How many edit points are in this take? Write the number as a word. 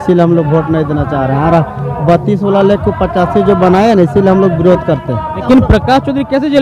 one